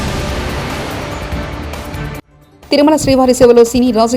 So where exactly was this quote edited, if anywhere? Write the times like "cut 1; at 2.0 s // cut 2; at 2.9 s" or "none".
cut 1; at 2.3 s